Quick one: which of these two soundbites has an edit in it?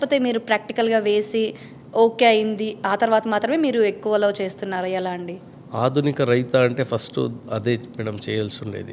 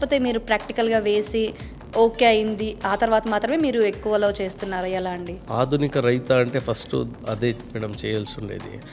second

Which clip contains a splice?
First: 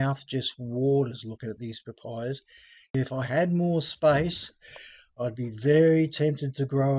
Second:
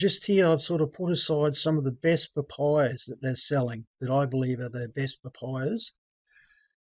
first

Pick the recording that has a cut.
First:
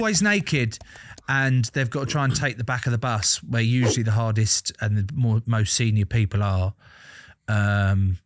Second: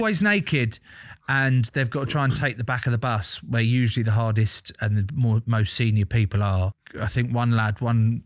second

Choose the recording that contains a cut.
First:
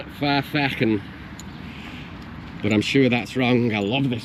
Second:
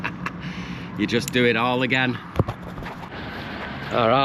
second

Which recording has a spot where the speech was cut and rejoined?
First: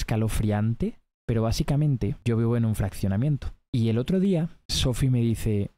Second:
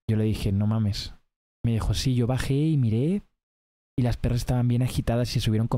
first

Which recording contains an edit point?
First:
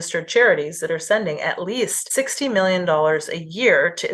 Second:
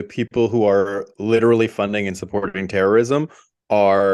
first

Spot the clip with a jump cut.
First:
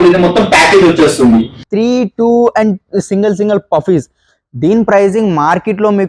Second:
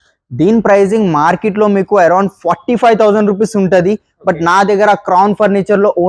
first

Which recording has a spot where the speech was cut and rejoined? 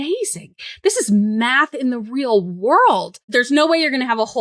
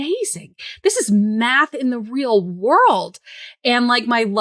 first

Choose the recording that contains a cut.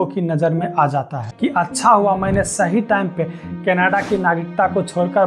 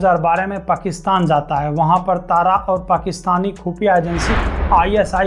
first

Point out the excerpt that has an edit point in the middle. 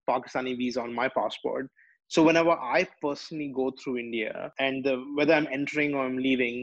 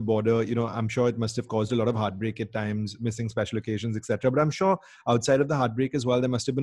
first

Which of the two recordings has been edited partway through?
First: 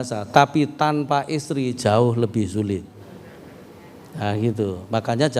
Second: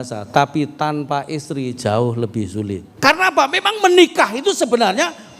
second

